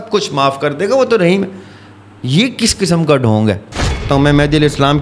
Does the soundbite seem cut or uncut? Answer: cut